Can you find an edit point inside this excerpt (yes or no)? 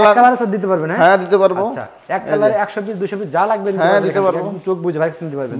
no